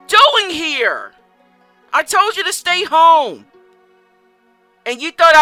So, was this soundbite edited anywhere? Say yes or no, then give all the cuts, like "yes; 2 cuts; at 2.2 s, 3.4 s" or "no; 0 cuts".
no; 0 cuts